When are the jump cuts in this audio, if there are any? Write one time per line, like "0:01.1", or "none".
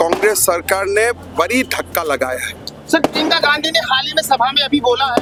none